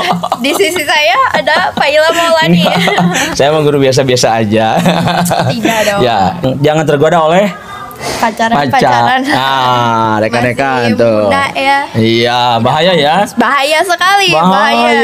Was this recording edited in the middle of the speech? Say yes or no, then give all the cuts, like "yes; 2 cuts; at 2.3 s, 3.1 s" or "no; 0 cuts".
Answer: yes; 1 cut; at 6.4 s